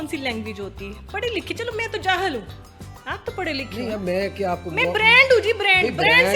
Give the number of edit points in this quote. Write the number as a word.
zero